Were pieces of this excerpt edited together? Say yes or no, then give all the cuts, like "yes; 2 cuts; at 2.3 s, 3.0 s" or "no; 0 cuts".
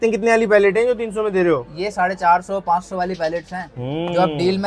no; 0 cuts